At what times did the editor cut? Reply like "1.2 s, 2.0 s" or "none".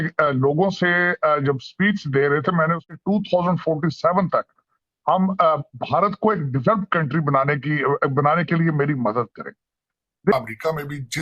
2.9 s, 10.3 s